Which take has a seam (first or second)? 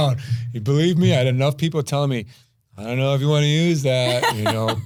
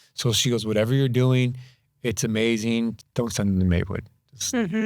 second